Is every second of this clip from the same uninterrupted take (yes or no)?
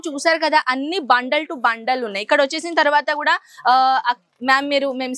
yes